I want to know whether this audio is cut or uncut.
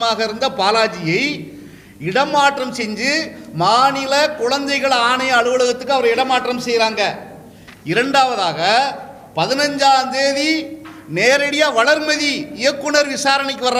uncut